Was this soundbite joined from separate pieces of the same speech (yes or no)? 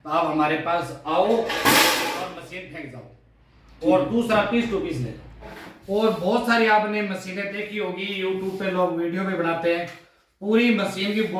yes